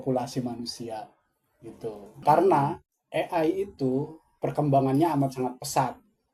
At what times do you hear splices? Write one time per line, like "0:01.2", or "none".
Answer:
0:02.2